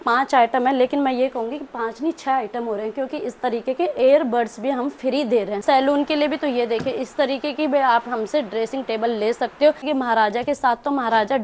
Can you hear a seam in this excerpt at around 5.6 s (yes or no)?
yes